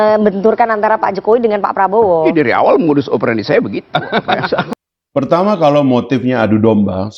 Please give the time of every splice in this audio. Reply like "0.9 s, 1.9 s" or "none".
4.7 s